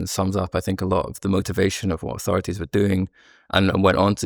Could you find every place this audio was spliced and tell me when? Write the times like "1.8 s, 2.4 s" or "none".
none